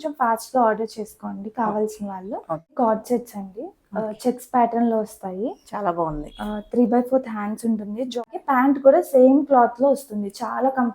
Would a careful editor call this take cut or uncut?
cut